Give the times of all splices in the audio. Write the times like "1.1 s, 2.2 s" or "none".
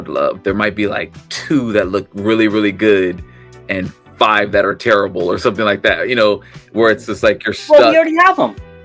none